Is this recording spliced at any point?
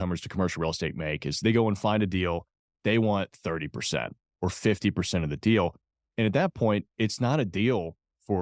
yes; 1 cut; at 1.4 s

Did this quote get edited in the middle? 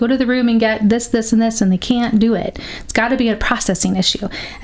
no; 0 cuts

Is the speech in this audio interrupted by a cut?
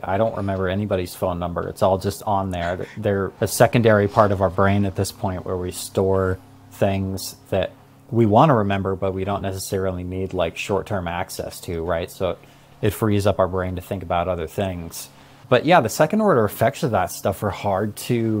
no; 0 cuts

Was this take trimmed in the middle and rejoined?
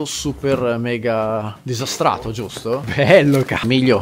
no; 0 cuts

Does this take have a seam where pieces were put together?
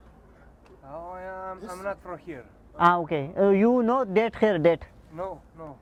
no; 0 cuts

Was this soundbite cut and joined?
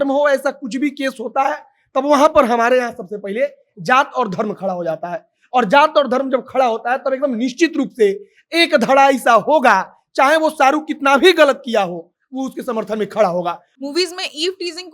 yes; 1 cut; at 13.7 s

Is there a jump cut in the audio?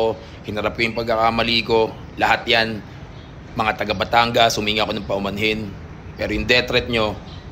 no; 0 cuts

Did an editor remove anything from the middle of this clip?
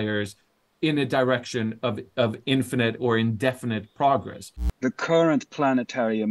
yes; 1 cut; at 4.6 s

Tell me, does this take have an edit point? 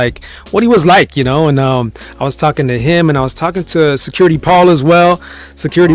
no; 0 cuts

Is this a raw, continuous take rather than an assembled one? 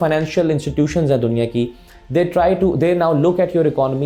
yes; 0 cuts

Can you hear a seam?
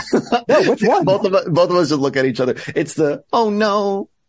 no; 0 cuts

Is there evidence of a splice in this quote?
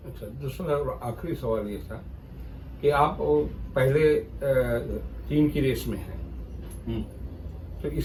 no; 0 cuts

